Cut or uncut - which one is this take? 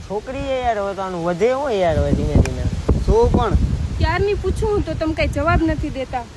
uncut